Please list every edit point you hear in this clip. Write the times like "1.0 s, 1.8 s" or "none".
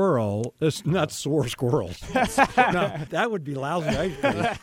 3.0 s

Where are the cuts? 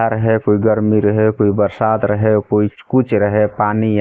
none

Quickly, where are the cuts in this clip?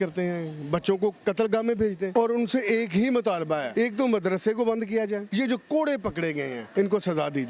2.1 s, 3.7 s, 5.2 s, 6.6 s

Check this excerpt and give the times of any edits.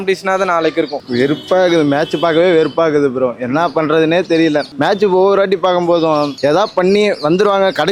0.9 s

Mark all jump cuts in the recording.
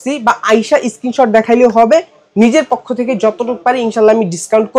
none

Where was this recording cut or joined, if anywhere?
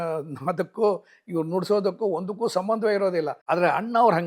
3.4 s

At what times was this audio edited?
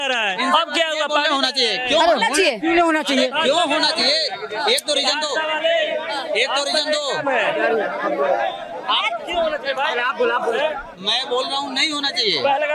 none

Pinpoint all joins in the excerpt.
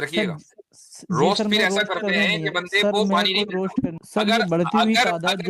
4.0 s

